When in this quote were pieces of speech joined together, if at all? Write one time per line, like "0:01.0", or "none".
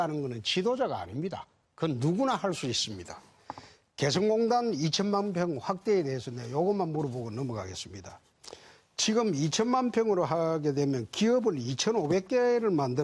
none